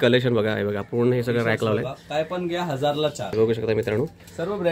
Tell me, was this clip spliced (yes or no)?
yes